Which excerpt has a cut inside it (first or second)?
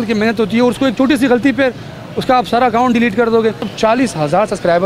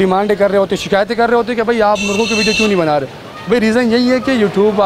first